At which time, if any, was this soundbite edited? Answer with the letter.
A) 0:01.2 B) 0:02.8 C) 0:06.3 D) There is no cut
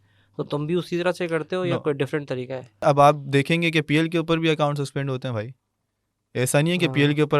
B